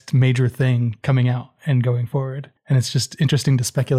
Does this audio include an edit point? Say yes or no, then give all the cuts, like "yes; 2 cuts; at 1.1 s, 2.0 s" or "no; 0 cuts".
yes; 2 cuts; at 1.0 s, 2.5 s